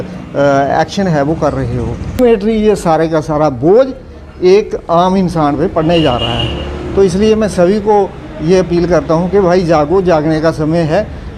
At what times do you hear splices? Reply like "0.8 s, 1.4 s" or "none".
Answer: 2.2 s